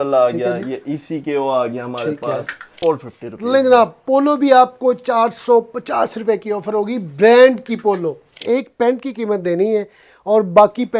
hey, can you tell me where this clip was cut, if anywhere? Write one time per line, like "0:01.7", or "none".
0:02.6
0:08.4